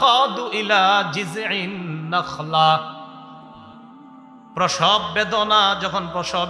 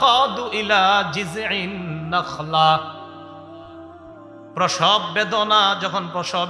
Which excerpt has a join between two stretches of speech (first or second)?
second